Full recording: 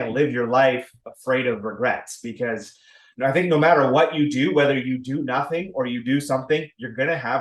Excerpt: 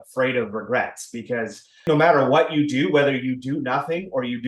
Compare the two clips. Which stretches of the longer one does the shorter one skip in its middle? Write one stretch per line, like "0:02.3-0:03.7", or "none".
0:03.0-0:03.5